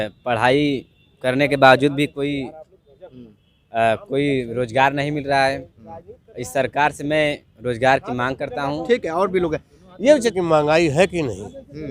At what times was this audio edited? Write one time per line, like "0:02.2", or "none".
0:10.3